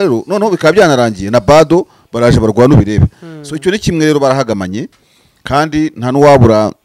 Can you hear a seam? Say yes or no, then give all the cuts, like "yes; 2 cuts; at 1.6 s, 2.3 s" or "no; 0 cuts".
no; 0 cuts